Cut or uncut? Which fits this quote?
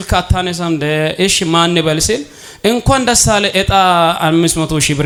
uncut